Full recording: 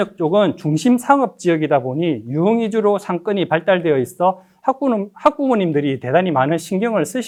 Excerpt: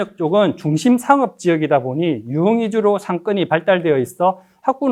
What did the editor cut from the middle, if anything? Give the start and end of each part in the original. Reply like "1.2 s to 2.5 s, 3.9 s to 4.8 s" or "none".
none